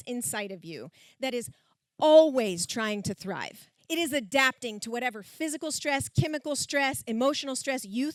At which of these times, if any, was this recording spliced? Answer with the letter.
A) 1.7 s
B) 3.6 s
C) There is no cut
C